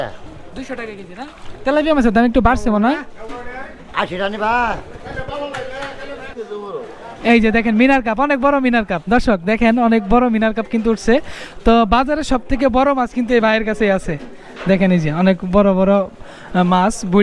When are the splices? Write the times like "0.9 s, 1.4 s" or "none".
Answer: 6.5 s